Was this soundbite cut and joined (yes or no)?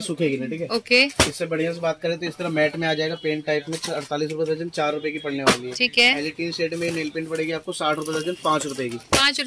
no